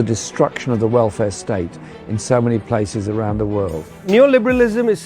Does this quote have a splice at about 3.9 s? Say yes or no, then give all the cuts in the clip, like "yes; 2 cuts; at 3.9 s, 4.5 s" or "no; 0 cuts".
yes; 1 cut; at 3.9 s